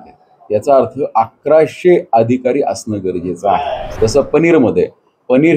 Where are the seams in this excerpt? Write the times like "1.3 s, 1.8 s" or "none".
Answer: 3.8 s

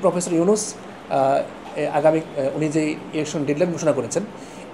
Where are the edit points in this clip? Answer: none

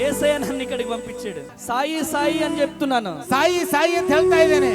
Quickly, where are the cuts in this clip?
1.5 s

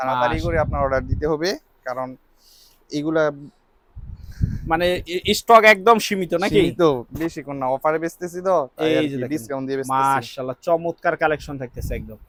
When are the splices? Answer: none

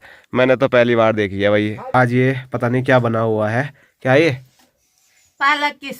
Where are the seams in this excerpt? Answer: 1.9 s

